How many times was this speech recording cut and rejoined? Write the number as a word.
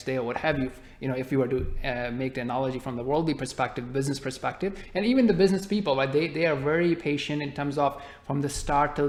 zero